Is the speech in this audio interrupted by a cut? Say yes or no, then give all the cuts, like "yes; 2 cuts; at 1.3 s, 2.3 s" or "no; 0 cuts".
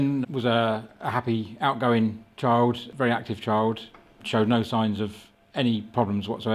yes; 2 cuts; at 2.9 s, 4.2 s